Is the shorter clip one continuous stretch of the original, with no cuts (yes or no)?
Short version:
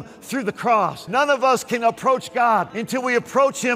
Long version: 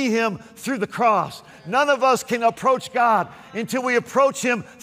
no